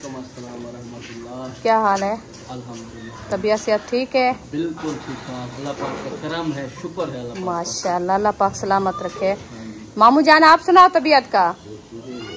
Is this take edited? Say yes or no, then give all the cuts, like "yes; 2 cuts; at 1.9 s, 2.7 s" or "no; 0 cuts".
no; 0 cuts